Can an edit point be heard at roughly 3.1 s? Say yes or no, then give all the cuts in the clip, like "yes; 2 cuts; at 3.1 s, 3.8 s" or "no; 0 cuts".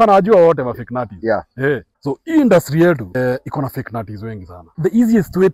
yes; 3 cuts; at 1.9 s, 3.1 s, 4.6 s